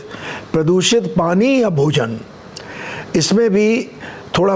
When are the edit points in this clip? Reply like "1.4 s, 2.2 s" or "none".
none